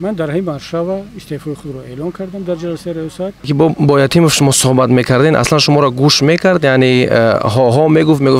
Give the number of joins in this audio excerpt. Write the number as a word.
one